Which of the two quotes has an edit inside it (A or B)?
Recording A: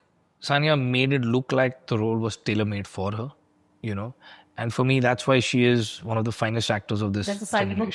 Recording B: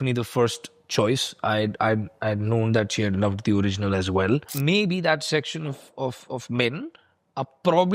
B